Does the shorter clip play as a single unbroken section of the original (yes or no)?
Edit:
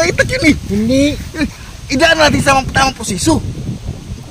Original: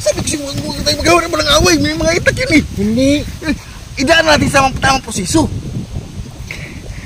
yes